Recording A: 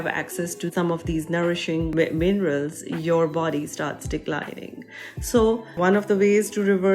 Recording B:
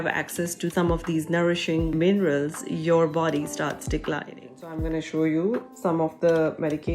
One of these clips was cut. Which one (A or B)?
B